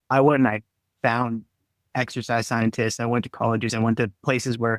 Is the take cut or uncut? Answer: uncut